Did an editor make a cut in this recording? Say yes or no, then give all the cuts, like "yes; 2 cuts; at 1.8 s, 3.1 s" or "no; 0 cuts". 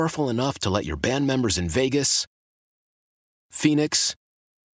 no; 0 cuts